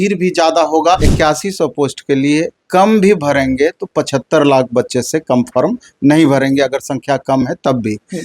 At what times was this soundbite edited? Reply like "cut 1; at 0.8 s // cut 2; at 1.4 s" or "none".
cut 1; at 1.1 s

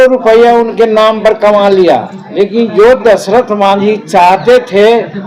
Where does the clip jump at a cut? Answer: cut 1; at 2.2 s

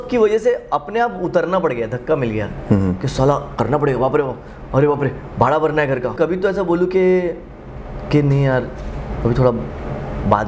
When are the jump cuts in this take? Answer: cut 1; at 6.1 s

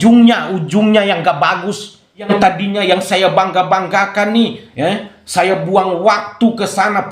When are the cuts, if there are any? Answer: cut 1; at 2.3 s

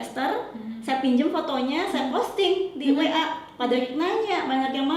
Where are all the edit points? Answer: none

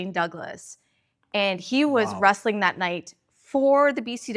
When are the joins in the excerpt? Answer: none

